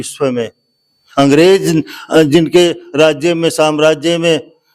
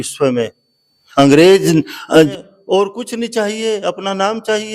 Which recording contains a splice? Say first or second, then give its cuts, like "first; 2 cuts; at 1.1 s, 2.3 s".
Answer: second; 1 cut; at 2.3 s